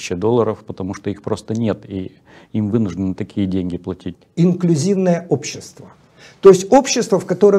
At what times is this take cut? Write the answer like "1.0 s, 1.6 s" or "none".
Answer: 4.1 s